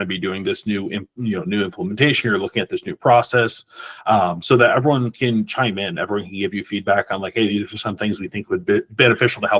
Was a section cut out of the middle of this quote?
no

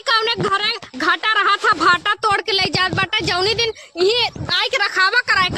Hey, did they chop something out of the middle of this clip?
no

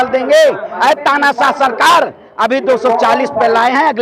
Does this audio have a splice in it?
no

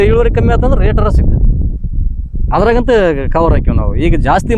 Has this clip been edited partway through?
no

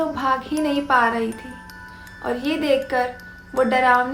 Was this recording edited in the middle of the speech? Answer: no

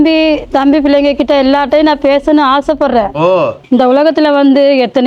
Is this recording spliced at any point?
yes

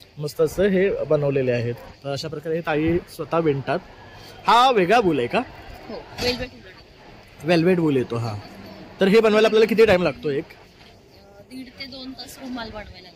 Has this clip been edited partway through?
no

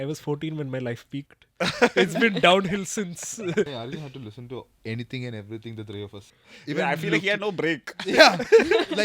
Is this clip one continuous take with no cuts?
no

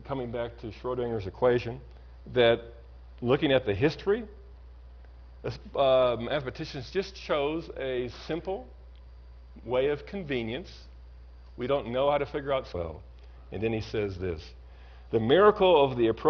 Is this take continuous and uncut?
yes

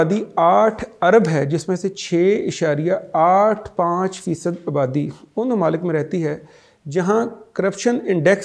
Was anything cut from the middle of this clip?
no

